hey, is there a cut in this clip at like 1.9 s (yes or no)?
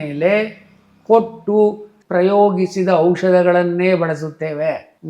yes